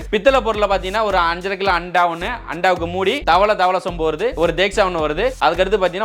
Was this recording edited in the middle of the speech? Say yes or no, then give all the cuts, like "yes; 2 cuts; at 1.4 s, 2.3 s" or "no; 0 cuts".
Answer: no; 0 cuts